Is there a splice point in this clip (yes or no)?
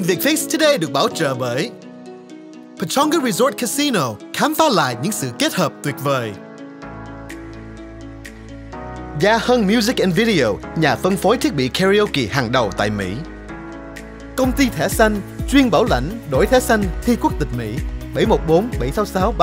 no